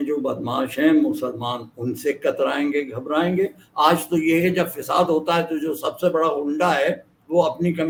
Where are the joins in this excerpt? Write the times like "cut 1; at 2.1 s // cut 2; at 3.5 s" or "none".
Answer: none